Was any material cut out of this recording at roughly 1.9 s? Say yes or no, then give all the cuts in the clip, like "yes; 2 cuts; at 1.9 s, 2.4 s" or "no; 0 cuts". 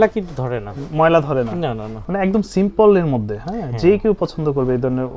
yes; 1 cut; at 1.9 s